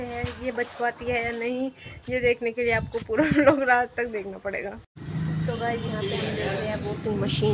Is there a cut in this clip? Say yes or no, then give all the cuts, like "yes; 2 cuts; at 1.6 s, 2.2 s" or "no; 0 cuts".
no; 0 cuts